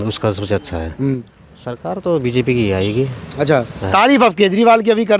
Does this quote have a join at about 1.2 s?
yes; 1 cut; at 1.2 s

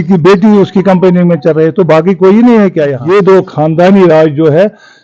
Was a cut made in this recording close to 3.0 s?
yes; 1 cut; at 3.0 s

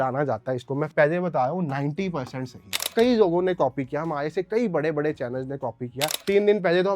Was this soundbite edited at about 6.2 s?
yes; 2 cuts; at 2.9 s, 6.2 s

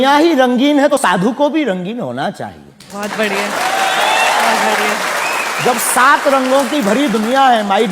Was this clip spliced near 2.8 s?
no; 1 cut; at 0.9 s

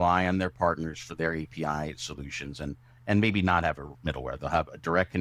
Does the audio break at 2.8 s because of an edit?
no; 0 cuts

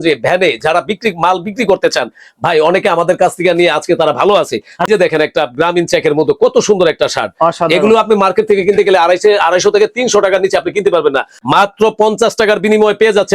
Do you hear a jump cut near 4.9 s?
yes; 2 cuts; at 4.9 s, 11.4 s

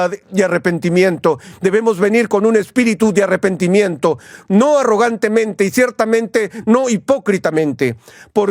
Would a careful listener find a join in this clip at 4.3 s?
no; 1 cut; at 1.4 s

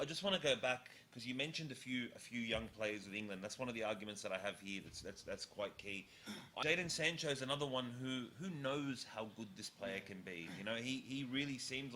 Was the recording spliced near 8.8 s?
no; 1 cut; at 6.5 s

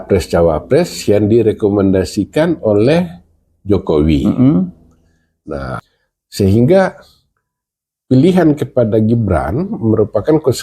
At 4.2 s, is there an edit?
no; 1 cut; at 5.7 s

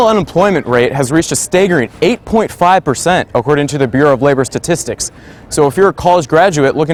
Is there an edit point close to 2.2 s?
no; 0 cuts

